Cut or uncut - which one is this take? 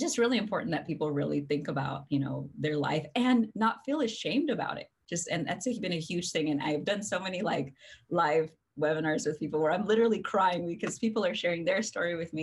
uncut